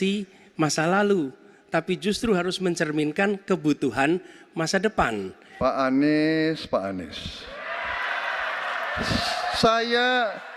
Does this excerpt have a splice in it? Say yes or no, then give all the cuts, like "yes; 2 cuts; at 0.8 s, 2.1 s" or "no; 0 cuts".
yes; 1 cut; at 5.4 s